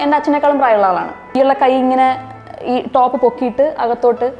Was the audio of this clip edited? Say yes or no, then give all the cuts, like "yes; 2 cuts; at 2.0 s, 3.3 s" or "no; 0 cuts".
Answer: yes; 1 cut; at 1.3 s